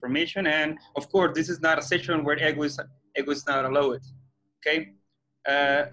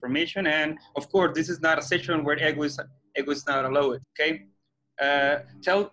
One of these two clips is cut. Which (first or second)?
second